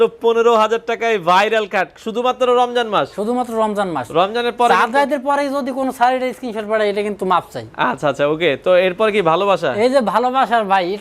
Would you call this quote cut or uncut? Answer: uncut